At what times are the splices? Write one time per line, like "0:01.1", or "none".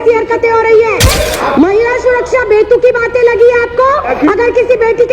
0:01.2
0:04.1